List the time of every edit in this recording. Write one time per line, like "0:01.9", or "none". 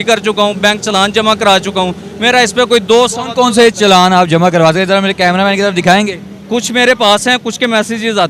none